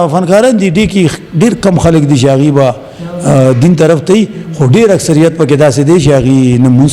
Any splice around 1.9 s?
no; 0 cuts

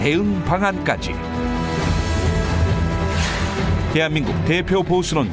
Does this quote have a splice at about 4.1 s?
yes; 1 cut; at 4.1 s

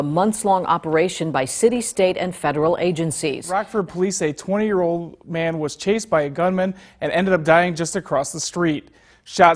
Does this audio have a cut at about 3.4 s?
yes; 1 cut; at 3.4 s

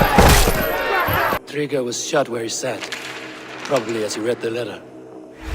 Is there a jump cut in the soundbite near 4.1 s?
no; 1 cut; at 1.4 s

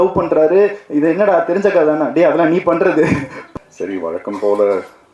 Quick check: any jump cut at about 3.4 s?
yes; 1 cut; at 3.4 s

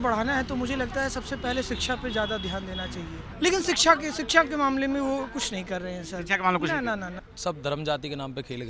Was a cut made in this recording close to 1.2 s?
no; 2 cuts; at 3.2 s, 7.2 s

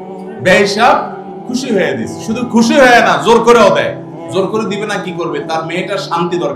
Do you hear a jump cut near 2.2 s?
no; 0 cuts

